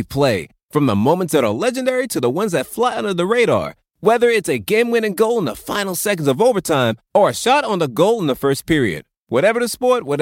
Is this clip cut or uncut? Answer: uncut